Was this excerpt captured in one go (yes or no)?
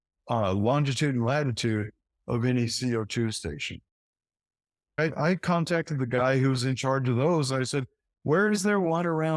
no